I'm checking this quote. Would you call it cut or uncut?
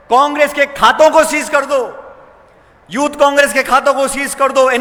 uncut